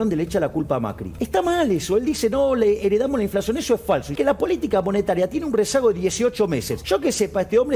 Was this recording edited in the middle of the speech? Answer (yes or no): yes